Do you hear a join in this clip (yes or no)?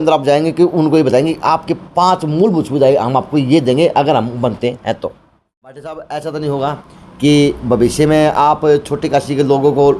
yes